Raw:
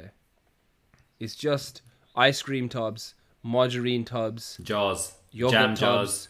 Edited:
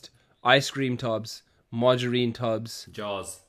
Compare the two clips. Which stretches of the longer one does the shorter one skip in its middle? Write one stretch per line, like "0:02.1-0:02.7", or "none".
none